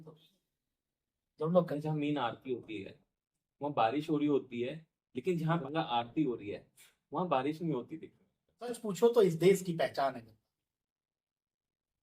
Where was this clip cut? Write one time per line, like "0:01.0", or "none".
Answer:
0:01.7
0:05.6
0:08.8